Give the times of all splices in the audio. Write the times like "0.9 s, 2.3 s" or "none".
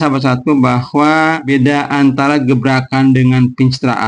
1.4 s